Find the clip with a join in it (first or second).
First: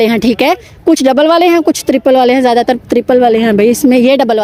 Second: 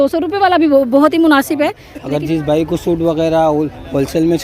second